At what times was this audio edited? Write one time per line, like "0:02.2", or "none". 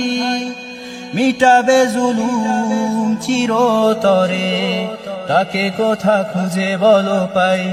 none